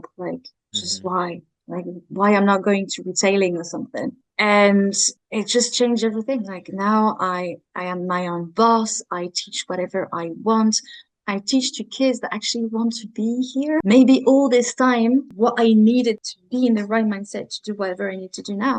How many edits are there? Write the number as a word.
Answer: three